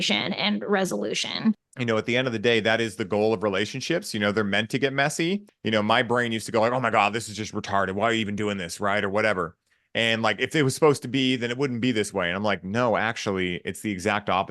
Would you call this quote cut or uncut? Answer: cut